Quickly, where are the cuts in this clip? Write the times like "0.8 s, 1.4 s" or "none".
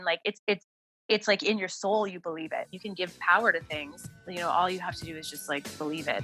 2.7 s